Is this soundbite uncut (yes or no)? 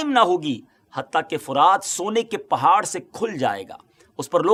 yes